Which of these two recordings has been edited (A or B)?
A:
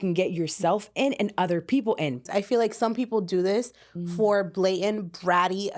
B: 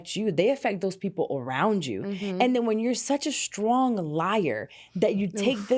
A